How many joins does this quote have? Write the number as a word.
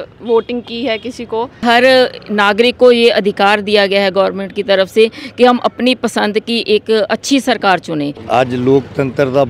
two